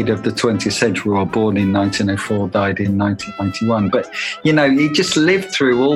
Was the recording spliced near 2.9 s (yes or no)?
yes